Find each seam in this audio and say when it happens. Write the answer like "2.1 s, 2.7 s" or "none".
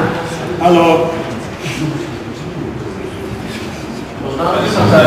none